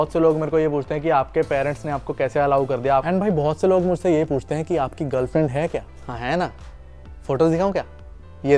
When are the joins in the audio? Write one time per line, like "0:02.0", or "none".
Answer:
0:03.1
0:06.0